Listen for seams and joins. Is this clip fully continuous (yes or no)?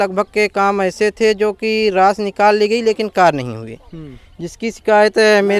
yes